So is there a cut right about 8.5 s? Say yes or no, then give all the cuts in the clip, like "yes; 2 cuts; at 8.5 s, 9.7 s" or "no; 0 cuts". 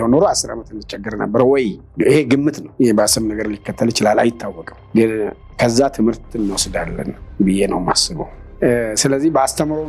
yes; 1 cut; at 8.5 s